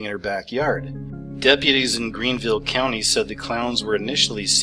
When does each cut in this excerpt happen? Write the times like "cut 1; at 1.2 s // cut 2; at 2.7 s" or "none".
cut 1; at 2.0 s